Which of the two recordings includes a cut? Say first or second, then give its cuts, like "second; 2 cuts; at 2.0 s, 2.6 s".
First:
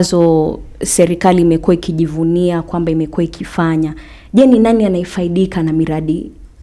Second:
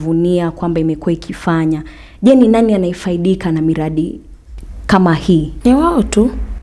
second; 1 cut; at 5.5 s